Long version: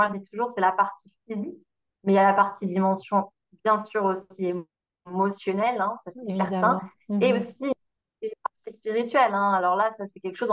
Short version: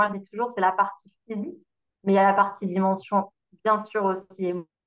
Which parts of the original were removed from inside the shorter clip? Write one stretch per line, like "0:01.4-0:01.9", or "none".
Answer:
none